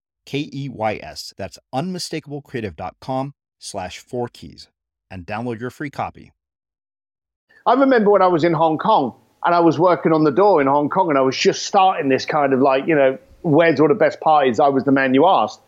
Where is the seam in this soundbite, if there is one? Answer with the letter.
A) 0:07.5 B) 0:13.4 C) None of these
A